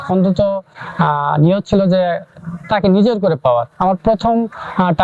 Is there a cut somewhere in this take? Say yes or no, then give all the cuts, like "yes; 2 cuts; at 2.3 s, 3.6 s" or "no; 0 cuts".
no; 0 cuts